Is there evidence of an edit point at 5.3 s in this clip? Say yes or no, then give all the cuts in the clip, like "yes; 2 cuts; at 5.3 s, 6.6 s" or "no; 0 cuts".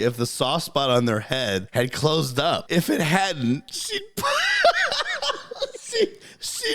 no; 2 cuts; at 1.7 s, 2.6 s